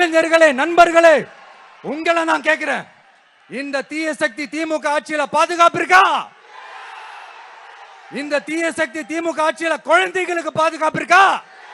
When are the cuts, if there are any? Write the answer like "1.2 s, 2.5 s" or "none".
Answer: none